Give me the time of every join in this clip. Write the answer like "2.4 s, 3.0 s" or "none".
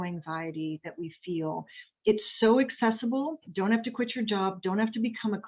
3.4 s